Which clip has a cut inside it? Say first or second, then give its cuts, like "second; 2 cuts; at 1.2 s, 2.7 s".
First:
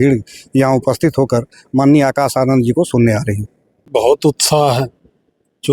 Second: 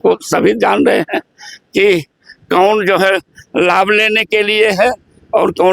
first; 1 cut; at 3.9 s